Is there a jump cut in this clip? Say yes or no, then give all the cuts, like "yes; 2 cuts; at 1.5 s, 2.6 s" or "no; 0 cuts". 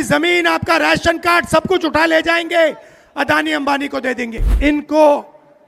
yes; 1 cut; at 4.4 s